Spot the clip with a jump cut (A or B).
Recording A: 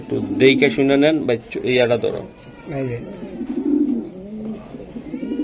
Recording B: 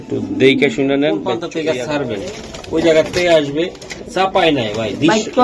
B